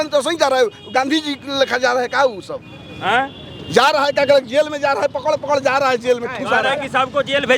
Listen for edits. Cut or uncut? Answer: uncut